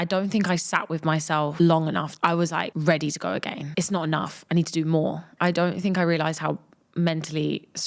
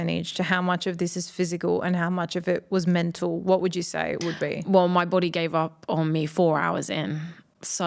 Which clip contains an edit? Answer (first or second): first